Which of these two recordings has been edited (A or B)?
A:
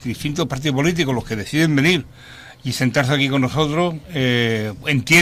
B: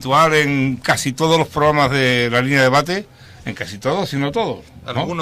B